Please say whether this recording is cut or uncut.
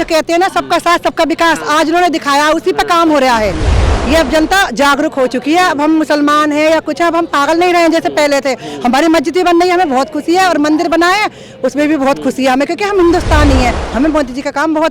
cut